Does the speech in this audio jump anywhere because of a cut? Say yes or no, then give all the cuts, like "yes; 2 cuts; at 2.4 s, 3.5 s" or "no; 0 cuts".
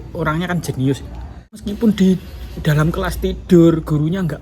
yes; 1 cut; at 1.7 s